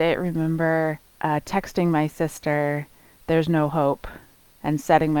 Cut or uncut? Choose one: cut